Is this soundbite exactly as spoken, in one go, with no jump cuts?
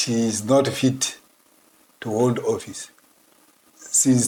yes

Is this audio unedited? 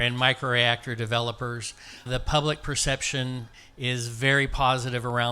no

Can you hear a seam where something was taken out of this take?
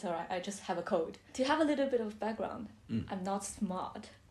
yes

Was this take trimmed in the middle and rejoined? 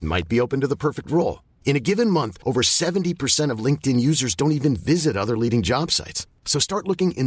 no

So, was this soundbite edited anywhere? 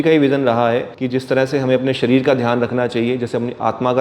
yes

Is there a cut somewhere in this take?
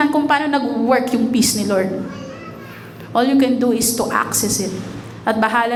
no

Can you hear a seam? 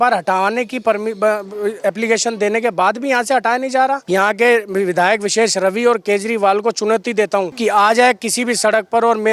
yes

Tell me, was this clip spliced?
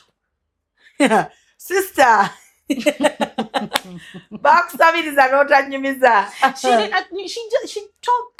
no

